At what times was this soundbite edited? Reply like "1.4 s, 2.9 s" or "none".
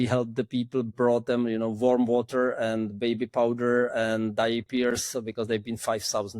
0.9 s